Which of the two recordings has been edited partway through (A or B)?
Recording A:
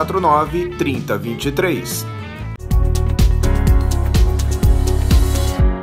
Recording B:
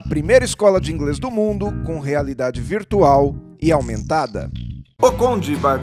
A